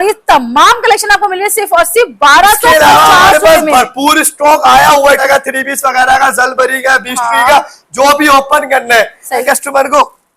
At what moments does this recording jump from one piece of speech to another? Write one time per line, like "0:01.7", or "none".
0:05.2
0:09.4

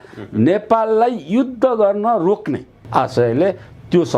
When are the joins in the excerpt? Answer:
0:02.8

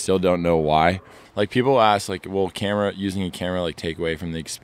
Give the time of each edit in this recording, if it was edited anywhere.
0:01.2

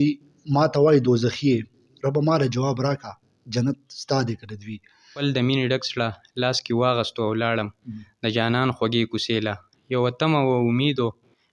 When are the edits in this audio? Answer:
0:01.9
0:05.2

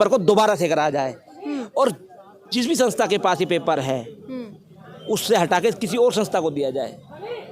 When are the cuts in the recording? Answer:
none

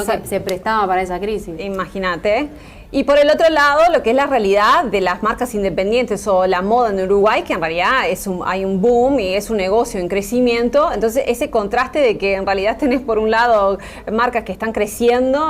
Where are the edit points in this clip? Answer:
0:14.4

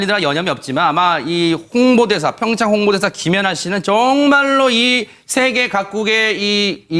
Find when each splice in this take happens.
0:01.4

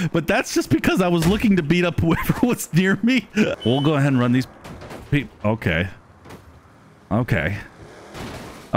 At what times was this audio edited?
0:03.6

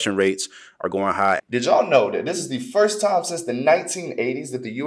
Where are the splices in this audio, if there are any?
0:01.4

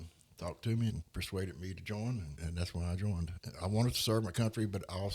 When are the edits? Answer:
0:01.0
0:02.4
0:03.4

